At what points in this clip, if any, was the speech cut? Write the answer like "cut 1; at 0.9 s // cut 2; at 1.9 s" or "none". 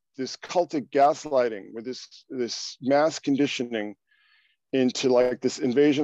none